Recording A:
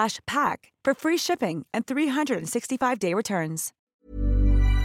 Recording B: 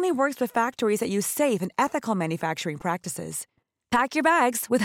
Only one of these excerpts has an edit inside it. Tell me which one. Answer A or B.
A